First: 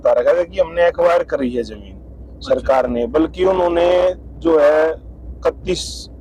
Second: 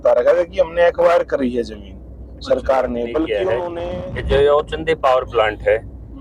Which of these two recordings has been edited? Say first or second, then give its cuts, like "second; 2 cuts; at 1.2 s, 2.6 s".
second; 1 cut; at 3.6 s